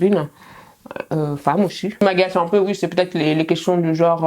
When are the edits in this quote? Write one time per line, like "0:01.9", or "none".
0:01.8